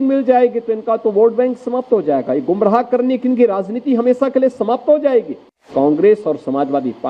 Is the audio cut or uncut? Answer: cut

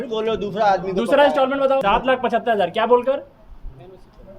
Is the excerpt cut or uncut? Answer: cut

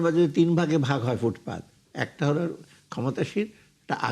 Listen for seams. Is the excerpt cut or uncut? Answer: uncut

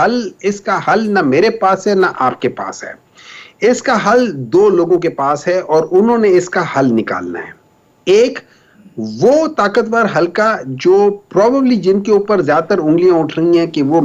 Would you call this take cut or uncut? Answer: uncut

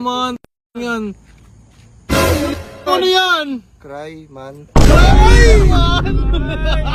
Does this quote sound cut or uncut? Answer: uncut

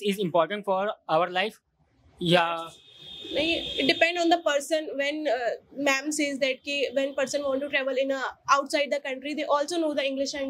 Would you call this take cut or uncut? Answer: uncut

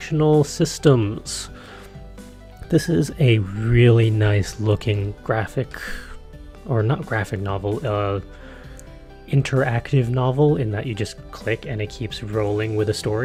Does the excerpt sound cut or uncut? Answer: uncut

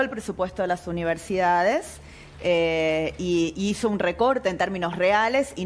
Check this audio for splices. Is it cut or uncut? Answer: uncut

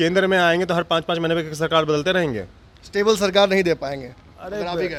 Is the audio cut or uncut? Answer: uncut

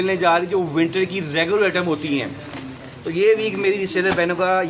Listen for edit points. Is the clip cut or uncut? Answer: uncut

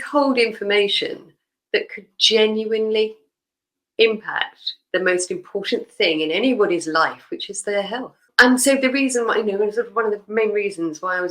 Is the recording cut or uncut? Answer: cut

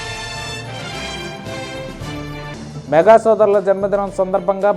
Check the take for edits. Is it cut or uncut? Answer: cut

